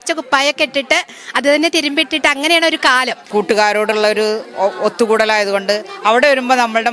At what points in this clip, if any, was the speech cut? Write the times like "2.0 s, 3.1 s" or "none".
3.2 s